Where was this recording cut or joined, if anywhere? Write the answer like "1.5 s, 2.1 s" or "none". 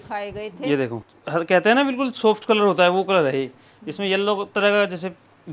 1.1 s